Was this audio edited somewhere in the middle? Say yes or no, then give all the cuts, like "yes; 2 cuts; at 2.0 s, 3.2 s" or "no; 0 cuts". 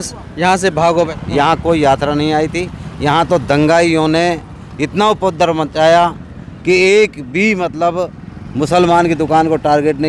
yes; 1 cut; at 1.1 s